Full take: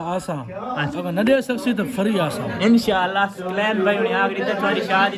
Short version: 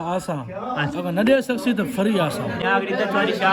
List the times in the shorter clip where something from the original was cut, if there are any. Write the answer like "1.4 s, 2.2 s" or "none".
2.6 s